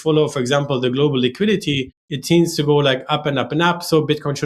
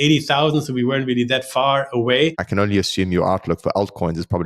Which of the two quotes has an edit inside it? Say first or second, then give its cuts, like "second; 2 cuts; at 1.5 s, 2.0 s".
second; 1 cut; at 2.4 s